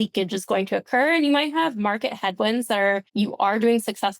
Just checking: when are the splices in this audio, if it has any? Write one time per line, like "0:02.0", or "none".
0:03.1